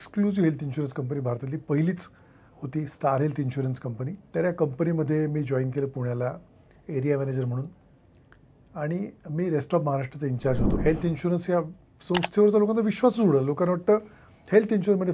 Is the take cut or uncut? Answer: cut